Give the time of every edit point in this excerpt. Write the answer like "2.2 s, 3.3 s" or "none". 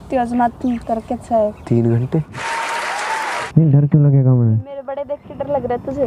2.4 s, 3.4 s